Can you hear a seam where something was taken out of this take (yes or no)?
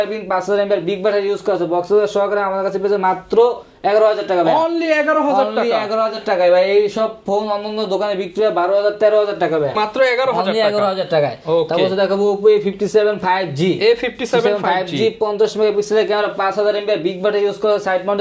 no